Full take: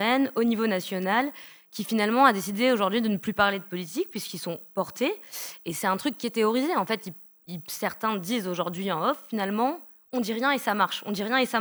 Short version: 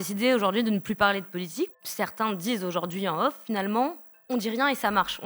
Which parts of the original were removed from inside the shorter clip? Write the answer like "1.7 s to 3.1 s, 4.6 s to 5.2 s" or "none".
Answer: 4.2 s to 7.7 s